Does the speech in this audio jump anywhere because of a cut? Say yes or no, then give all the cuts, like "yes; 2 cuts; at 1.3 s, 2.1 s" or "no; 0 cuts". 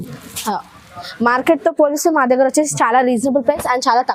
yes; 1 cut; at 1.0 s